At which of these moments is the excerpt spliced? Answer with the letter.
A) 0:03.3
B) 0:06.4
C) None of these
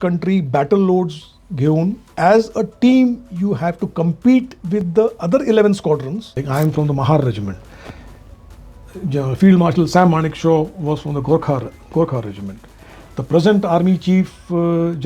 B